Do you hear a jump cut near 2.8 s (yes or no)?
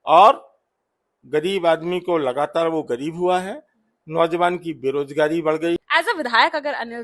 no